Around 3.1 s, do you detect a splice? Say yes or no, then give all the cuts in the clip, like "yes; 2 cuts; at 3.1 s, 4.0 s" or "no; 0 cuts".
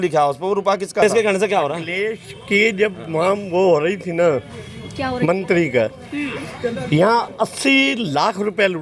no; 1 cut; at 1.0 s